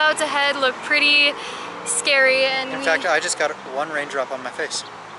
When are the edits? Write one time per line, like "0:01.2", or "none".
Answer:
none